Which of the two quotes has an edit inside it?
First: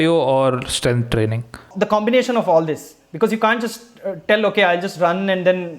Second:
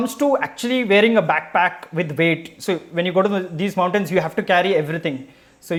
first; 1 cut; at 1.7 s

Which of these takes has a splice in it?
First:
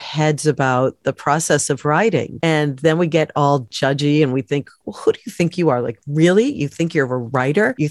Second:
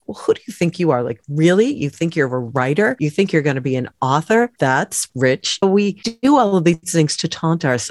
second; 2 cuts; at 4.5 s, 5.7 s

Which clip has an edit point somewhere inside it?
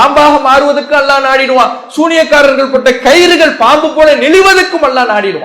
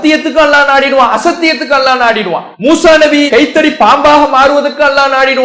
second; 1 cut; at 2.5 s

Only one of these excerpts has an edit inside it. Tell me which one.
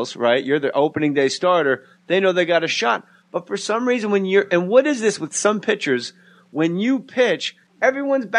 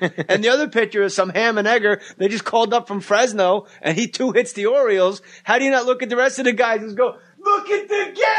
second; 1 cut; at 0.9 s

